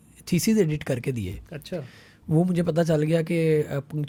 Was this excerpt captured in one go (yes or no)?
yes